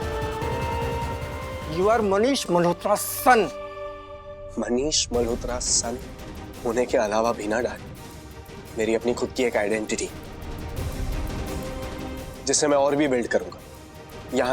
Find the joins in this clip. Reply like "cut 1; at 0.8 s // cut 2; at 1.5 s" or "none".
none